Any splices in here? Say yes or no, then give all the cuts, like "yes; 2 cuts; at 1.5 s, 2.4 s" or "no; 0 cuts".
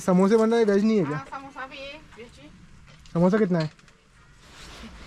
no; 0 cuts